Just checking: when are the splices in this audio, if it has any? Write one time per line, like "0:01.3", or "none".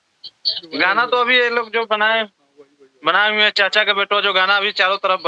none